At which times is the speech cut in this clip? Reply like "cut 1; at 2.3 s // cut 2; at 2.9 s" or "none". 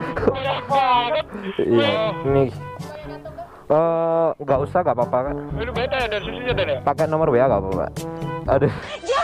cut 1; at 1.9 s